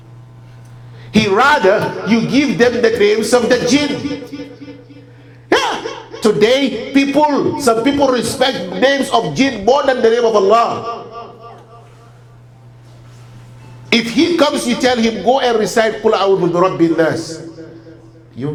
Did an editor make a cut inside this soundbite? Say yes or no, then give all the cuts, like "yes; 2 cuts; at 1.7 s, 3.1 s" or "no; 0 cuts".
no; 0 cuts